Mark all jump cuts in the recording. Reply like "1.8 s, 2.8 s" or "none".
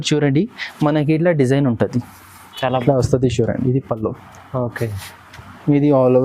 2.8 s